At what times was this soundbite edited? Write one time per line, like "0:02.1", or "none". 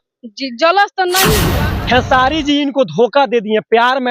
0:01.4